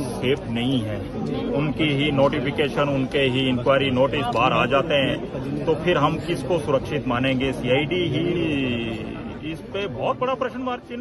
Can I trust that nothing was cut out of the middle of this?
yes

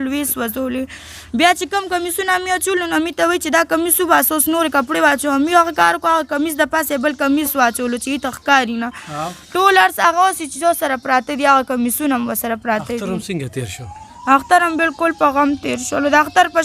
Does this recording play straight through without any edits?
yes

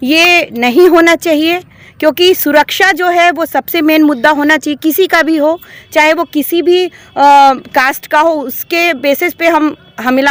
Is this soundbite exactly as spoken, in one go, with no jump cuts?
yes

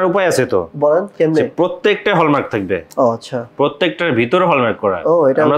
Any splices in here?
no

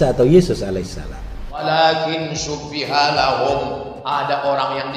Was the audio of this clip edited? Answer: yes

